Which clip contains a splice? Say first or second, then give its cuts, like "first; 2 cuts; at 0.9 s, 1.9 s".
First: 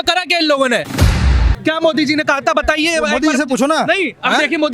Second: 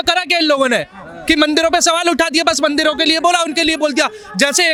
first; 1 cut; at 1.3 s